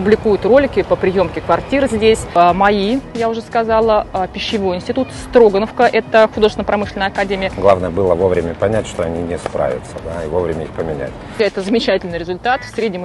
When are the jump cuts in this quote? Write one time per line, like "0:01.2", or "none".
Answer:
0:02.3
0:07.5
0:11.4